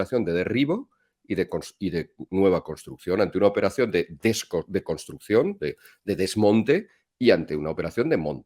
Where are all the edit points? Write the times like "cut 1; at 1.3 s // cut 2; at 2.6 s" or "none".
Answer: none